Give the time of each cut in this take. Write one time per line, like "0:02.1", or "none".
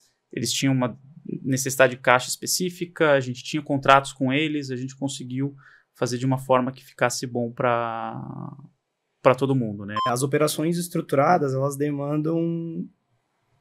0:10.0